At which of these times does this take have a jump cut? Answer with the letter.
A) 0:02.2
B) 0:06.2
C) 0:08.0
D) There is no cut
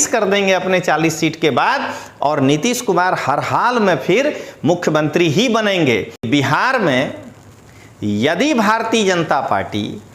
B